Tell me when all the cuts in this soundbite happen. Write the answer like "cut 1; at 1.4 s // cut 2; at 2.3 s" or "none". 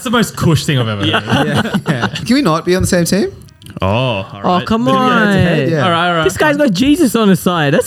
cut 1; at 2.2 s